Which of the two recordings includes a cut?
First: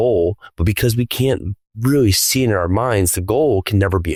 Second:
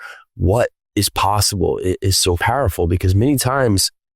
second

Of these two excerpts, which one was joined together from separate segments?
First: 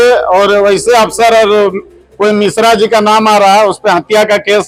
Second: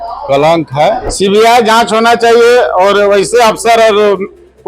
second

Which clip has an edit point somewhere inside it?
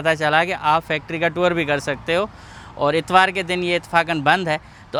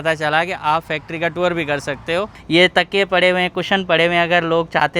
second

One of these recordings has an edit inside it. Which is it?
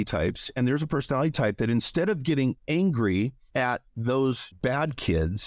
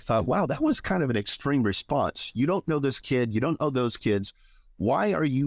first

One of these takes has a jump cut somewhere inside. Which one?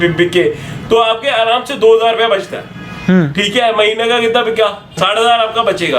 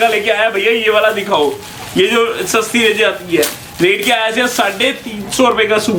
first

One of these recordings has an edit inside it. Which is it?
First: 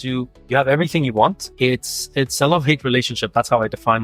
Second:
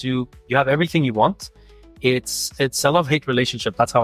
first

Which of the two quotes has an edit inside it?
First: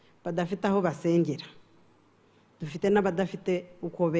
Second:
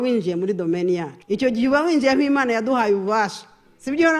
second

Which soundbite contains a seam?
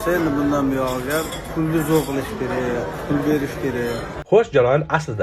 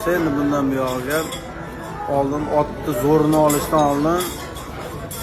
first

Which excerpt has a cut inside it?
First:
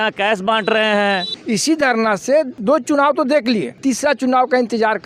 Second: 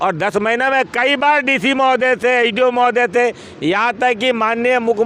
first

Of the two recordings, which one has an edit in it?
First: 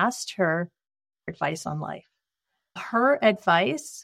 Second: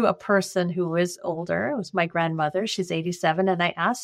first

